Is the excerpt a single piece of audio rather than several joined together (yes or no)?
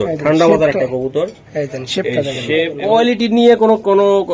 no